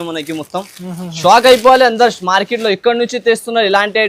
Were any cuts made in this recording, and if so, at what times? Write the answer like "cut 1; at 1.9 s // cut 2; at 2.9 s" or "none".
none